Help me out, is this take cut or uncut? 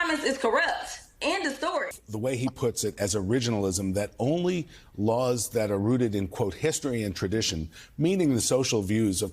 cut